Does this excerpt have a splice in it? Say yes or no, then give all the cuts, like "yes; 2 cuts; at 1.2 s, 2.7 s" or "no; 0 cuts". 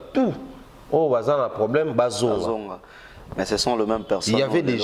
no; 0 cuts